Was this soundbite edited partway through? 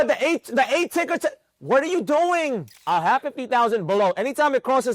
yes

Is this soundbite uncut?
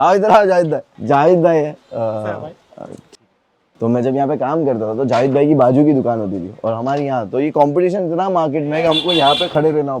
yes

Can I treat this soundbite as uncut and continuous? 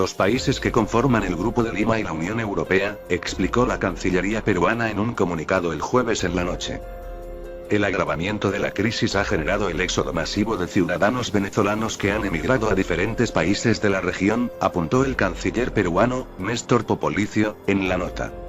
no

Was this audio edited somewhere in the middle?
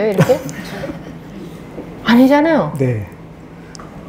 no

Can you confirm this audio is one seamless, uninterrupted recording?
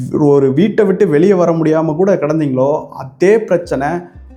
yes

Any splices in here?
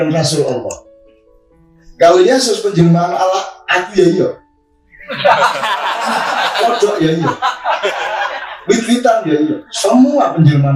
no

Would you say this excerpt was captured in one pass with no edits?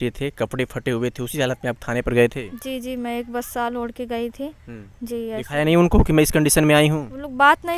yes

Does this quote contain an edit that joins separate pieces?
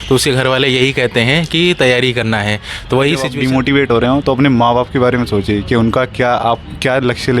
yes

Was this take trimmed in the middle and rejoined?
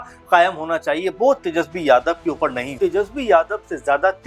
yes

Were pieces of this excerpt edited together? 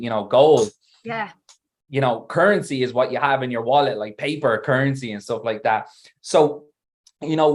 no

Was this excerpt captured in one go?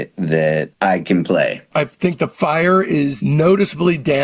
no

